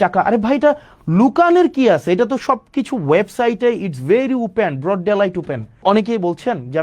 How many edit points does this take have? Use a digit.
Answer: 1